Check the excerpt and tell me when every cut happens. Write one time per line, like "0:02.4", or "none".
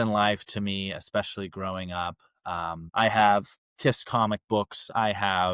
0:02.8